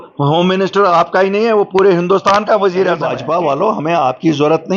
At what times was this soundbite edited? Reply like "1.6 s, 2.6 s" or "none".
3.1 s